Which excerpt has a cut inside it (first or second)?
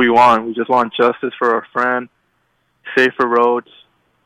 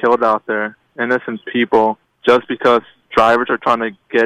second